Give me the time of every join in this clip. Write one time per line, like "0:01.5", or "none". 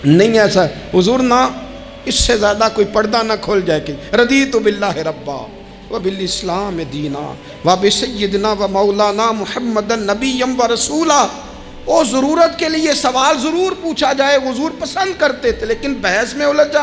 none